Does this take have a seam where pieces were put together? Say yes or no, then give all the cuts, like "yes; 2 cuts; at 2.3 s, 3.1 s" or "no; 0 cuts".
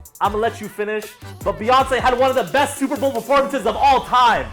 no; 0 cuts